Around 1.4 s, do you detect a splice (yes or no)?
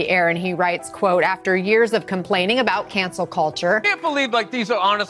no